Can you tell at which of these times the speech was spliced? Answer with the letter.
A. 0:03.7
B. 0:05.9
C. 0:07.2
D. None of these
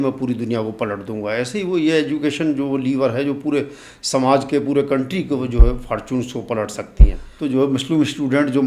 C